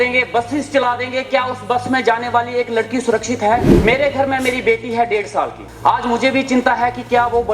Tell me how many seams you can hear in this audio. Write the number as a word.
two